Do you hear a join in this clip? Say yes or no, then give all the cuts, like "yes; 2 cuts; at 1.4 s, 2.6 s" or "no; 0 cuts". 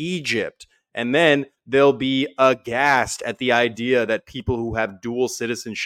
no; 0 cuts